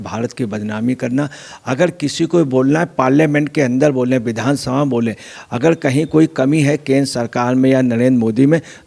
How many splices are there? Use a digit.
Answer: 0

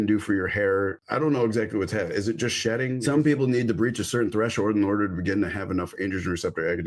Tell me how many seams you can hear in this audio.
1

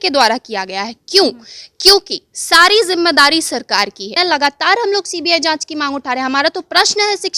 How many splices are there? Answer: 1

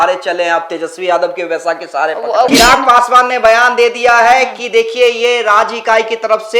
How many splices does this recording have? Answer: 1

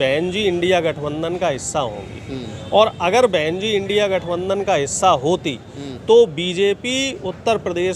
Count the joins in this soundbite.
0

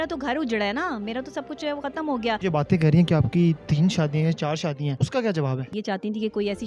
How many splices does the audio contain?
3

